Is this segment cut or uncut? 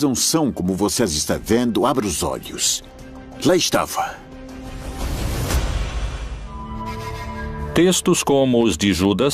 cut